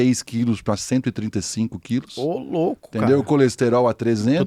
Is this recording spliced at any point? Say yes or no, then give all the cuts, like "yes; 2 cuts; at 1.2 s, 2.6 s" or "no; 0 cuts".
no; 0 cuts